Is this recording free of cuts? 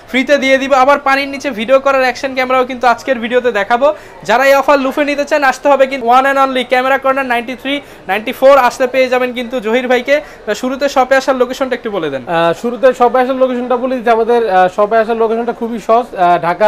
yes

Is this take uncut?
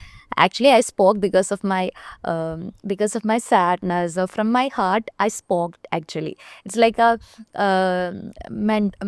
yes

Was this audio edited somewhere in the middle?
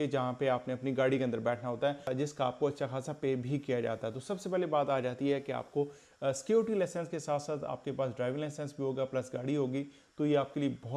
no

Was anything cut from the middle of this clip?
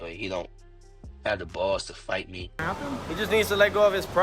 yes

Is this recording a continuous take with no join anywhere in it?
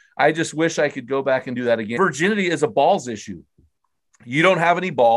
no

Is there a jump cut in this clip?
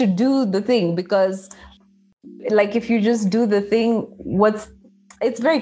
no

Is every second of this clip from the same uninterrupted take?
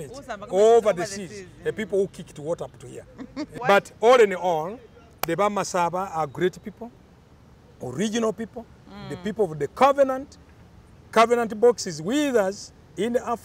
no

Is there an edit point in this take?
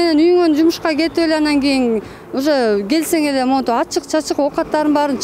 no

